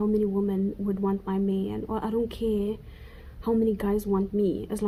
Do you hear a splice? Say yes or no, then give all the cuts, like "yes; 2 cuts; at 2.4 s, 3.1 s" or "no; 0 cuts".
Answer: no; 0 cuts